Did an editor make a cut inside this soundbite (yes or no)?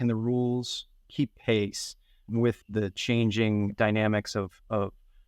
yes